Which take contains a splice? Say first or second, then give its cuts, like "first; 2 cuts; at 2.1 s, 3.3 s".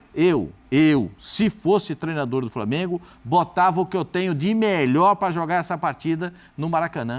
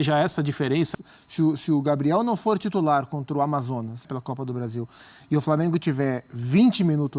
second; 2 cuts; at 0.9 s, 4.1 s